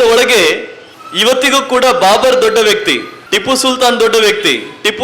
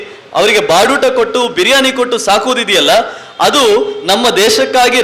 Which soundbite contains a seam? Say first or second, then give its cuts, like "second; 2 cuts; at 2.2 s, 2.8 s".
first; 1 cut; at 3.1 s